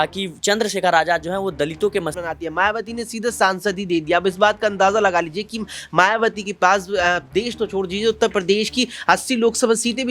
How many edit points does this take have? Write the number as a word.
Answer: one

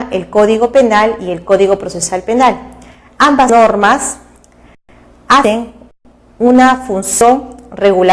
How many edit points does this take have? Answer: zero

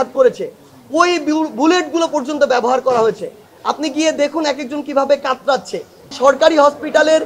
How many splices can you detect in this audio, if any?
one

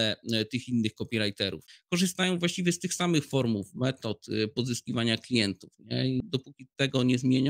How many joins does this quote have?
two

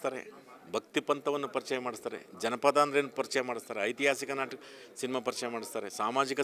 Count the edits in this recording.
zero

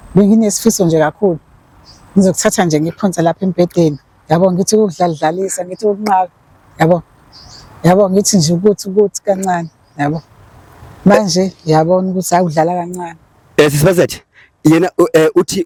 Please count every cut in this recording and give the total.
zero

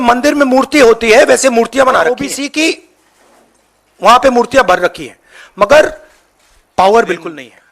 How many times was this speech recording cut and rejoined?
one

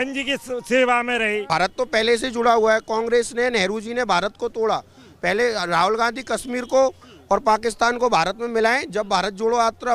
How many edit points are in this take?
one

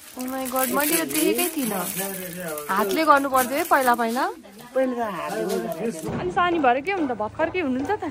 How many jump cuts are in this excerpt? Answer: one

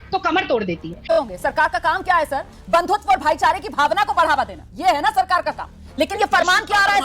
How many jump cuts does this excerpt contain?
two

